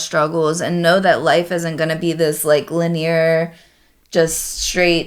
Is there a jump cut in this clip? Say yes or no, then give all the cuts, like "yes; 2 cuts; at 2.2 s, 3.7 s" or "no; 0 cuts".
no; 0 cuts